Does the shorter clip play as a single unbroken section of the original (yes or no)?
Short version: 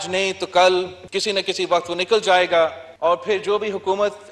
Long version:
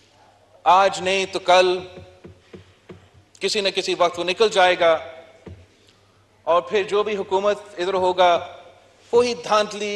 no